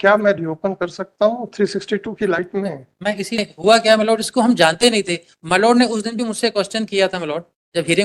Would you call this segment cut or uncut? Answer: cut